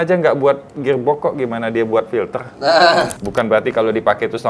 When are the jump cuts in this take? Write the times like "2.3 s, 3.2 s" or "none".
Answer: 3.2 s